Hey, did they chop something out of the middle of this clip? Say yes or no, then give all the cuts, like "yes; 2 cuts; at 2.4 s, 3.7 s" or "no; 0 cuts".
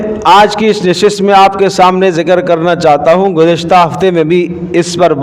no; 0 cuts